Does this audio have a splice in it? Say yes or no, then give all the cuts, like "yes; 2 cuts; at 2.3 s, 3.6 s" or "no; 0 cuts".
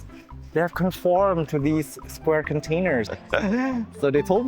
yes; 1 cut; at 3.1 s